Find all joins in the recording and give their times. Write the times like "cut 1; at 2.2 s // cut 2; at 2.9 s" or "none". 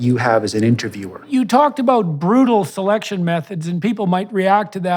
cut 1; at 1.3 s

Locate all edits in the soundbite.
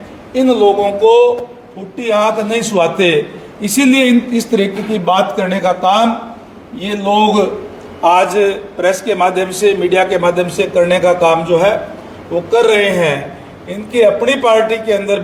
none

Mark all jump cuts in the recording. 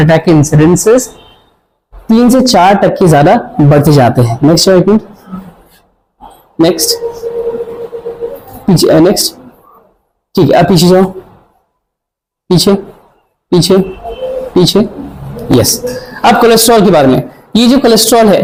none

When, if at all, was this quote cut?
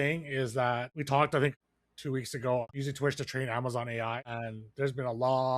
cut 1; at 0.9 s // cut 2; at 1.6 s // cut 3; at 2.6 s // cut 4; at 4.3 s

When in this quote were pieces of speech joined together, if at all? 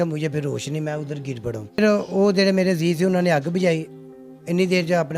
cut 1; at 1.8 s

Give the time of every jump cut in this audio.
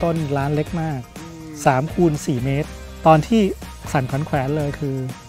cut 1; at 2.8 s

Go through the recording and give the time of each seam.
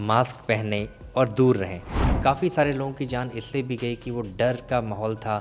cut 1; at 2.0 s

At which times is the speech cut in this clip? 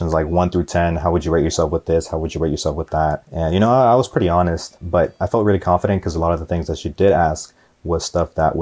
cut 1; at 3.3 s // cut 2; at 4.8 s

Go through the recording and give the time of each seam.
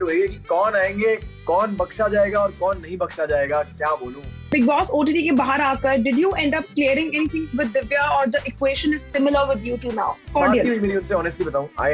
none

